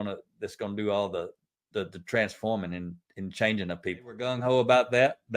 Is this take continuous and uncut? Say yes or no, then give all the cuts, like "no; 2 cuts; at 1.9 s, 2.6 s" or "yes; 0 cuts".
no; 1 cut; at 4.3 s